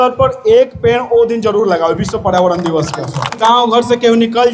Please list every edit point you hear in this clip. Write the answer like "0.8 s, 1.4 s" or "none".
3.4 s

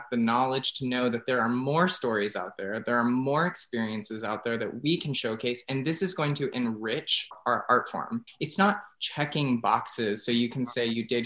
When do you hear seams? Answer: 7.3 s, 8.2 s

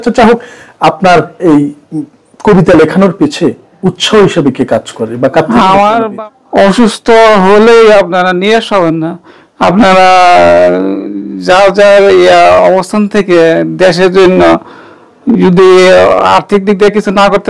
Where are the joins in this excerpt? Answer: 6.1 s

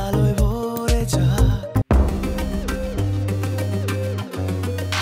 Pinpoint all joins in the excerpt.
1.8 s

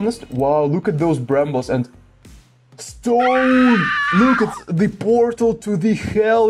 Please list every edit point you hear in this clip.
none

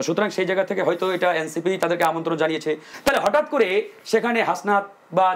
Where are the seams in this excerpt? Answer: 2.9 s

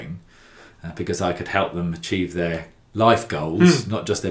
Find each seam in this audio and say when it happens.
none

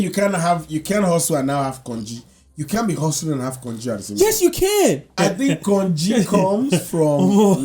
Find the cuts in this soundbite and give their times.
5.1 s

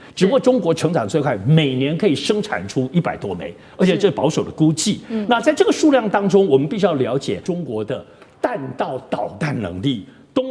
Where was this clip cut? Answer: 7.4 s

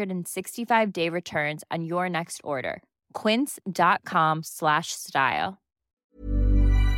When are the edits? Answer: 6.0 s

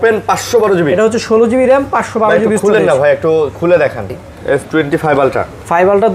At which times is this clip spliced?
4.2 s

